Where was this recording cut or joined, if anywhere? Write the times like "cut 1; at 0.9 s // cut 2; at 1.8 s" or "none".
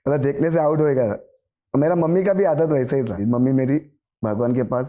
cut 1; at 3.2 s

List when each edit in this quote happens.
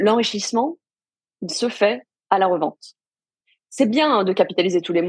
none

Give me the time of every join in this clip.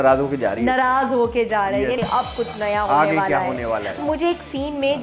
cut 1; at 2.0 s // cut 2; at 4.0 s

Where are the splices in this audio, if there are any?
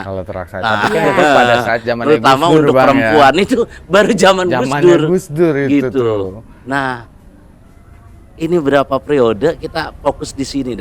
none

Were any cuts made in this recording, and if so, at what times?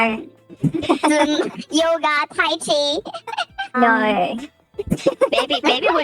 cut 1; at 3.7 s

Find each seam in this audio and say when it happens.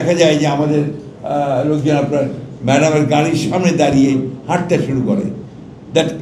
none

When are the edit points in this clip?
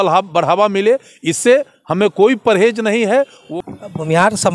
cut 1; at 3.4 s

